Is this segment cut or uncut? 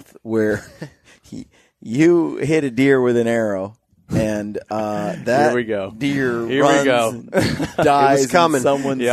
uncut